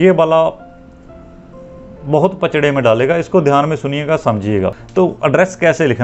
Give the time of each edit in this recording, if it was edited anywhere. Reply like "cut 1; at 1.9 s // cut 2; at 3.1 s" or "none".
cut 1; at 4.8 s